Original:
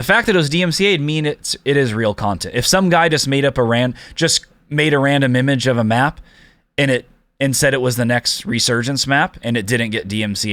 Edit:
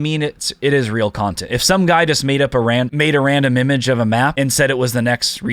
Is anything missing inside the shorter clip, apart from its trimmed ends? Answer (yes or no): yes